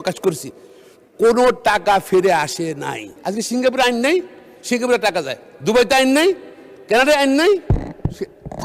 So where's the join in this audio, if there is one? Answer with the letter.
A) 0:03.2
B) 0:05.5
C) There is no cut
A